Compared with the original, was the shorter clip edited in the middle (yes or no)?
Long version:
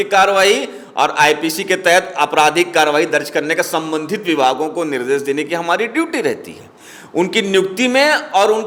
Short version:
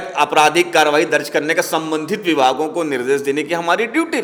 no